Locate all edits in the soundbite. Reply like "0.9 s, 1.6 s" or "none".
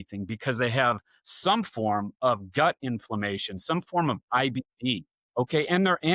5.1 s